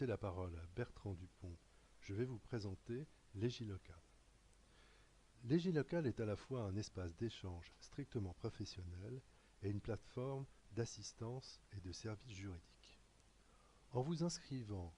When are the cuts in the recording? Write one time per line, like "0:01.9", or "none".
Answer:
0:01.6